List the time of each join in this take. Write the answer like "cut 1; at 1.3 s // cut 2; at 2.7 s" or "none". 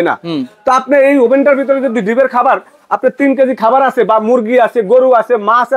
none